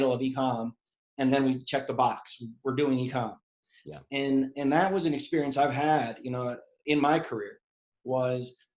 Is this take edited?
yes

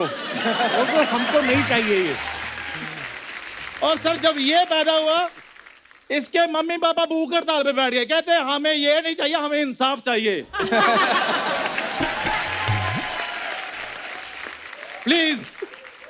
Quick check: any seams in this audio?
no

